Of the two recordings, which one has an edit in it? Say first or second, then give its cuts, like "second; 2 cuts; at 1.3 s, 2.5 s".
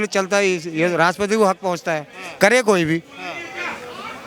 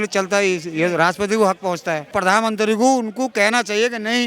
second; 1 cut; at 2.1 s